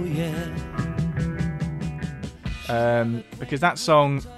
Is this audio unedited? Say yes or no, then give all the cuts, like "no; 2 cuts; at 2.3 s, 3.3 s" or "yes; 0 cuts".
no; 1 cut; at 2.6 s